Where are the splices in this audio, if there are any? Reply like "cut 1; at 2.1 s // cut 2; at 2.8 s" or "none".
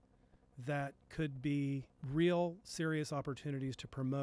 cut 1; at 2.0 s